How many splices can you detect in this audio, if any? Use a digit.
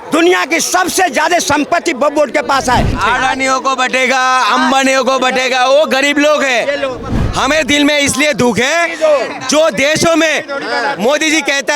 2